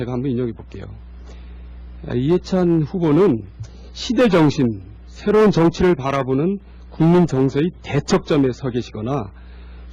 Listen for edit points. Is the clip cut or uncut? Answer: uncut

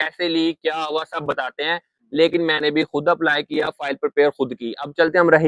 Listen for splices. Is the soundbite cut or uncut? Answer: uncut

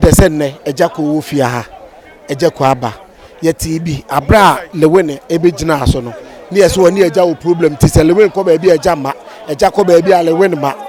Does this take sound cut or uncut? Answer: uncut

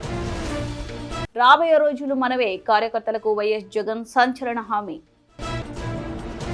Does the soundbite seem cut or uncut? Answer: cut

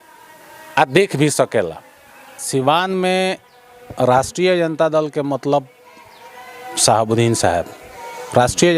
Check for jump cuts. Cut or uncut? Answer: cut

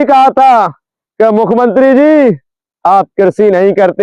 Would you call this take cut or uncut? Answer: uncut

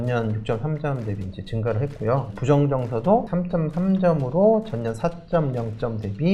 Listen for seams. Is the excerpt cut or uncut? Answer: uncut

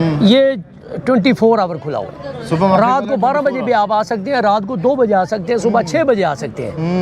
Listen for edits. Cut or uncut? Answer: uncut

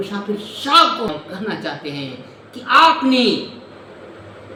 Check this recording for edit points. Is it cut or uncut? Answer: uncut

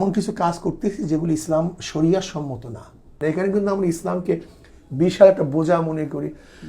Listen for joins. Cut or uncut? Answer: cut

